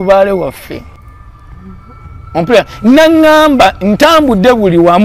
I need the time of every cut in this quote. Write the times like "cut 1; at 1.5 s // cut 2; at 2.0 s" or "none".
cut 1; at 0.9 s